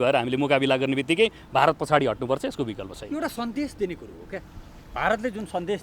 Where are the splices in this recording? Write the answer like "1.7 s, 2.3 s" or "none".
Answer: none